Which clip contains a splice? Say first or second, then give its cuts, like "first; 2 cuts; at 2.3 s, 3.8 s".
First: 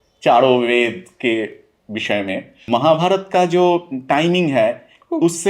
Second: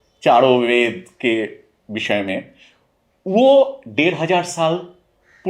first; 1 cut; at 2.7 s